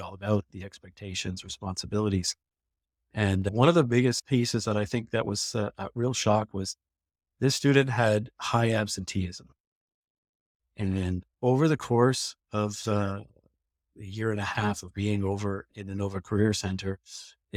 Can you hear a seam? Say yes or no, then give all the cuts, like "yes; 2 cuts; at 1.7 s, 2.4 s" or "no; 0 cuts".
no; 0 cuts